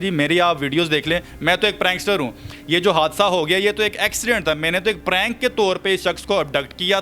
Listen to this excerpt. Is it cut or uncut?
uncut